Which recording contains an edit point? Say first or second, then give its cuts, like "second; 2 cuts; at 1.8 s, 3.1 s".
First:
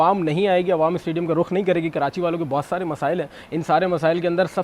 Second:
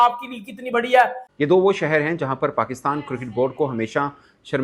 second; 1 cut; at 1.2 s